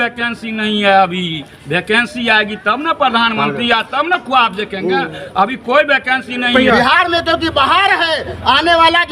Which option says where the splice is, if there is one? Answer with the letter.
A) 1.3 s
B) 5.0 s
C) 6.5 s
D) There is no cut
C